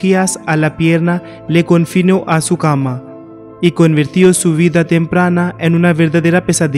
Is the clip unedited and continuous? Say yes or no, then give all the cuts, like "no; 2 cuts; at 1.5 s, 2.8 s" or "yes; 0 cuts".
yes; 0 cuts